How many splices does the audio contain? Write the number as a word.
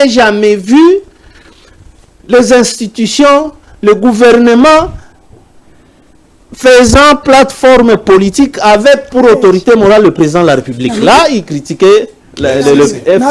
zero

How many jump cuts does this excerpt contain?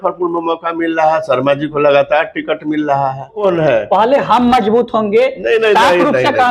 one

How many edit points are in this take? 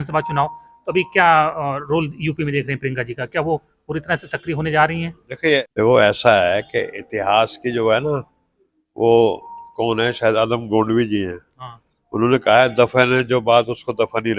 one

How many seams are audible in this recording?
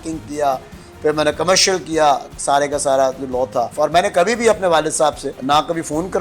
two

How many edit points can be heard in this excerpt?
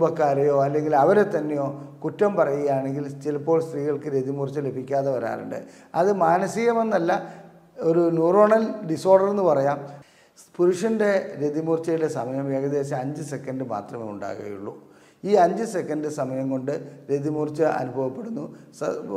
one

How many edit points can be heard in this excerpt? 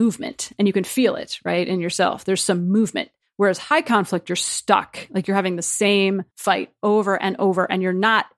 one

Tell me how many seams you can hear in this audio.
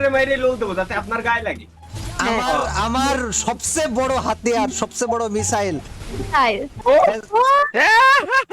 one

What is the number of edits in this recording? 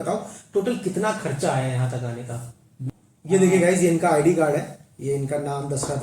one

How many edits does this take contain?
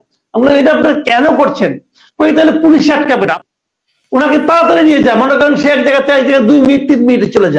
one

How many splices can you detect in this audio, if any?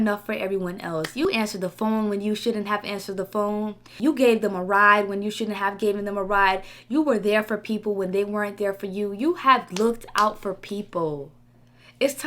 two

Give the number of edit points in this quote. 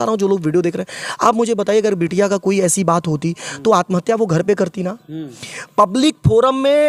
zero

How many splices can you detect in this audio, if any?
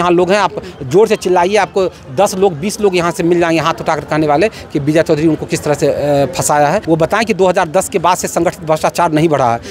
one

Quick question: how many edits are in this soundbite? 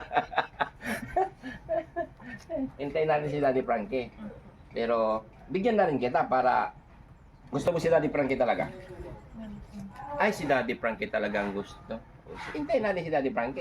one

